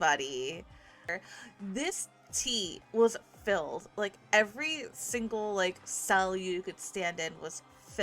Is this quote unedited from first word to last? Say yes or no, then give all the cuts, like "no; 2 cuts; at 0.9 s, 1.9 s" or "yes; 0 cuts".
no; 1 cut; at 1.1 s